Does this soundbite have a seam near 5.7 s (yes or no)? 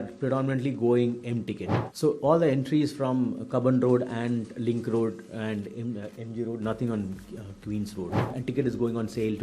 no